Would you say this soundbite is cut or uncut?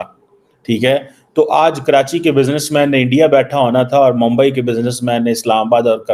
uncut